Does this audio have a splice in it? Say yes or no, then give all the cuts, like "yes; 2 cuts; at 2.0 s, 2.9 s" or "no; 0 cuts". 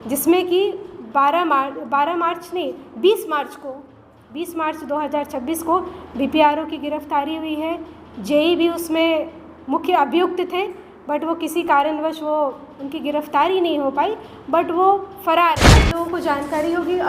yes; 1 cut; at 15.9 s